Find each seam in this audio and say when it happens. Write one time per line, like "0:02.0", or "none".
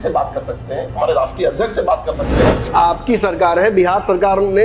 0:02.7